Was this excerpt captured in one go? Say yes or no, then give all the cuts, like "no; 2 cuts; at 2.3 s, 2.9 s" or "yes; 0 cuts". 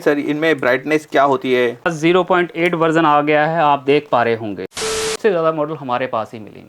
no; 2 cuts; at 1.9 s, 5.1 s